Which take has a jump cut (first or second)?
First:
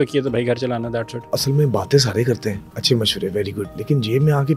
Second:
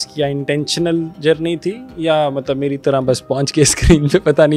first